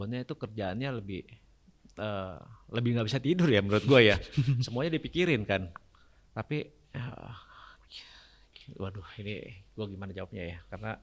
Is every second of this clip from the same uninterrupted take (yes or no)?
yes